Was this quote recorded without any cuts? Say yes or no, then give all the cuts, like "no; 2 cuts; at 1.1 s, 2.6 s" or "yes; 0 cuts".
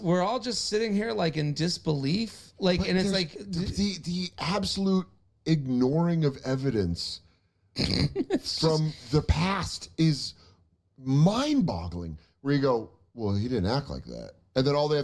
no; 1 cut; at 3.4 s